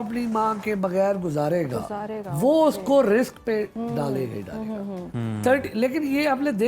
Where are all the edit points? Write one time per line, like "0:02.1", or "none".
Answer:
none

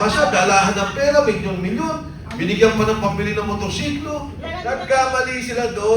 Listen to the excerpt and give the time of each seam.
0:04.5

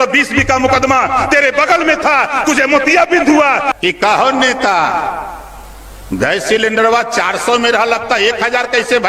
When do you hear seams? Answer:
0:03.7

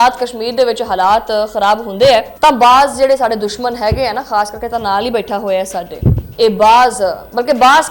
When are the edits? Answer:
none

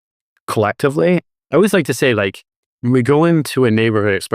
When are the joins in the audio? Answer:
0:01.3

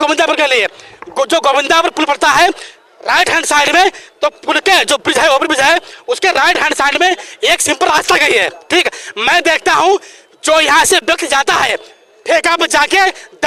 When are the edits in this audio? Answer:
none

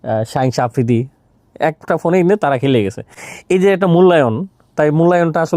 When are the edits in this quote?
none

